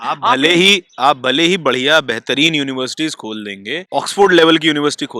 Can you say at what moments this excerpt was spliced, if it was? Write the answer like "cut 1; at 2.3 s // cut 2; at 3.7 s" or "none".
cut 1; at 3.8 s

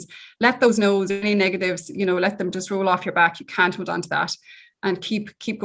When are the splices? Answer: none

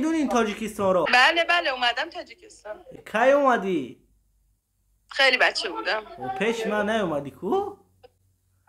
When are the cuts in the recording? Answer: cut 1; at 1.1 s // cut 2; at 2.9 s

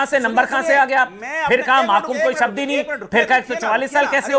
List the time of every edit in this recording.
none

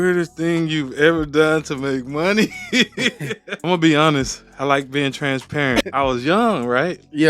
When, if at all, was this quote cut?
cut 1; at 3.5 s // cut 2; at 5.8 s

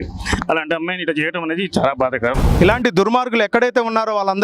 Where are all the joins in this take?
cut 1; at 2.5 s

